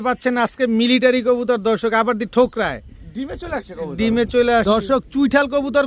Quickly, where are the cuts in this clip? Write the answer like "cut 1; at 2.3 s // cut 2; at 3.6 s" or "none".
cut 1; at 4.6 s